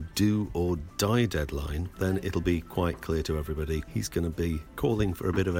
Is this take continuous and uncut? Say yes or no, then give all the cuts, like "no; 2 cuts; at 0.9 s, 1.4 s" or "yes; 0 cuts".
no; 3 cuts; at 1.8 s, 3.9 s, 4.7 s